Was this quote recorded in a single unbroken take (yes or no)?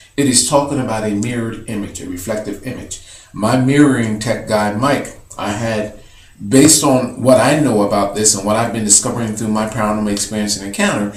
yes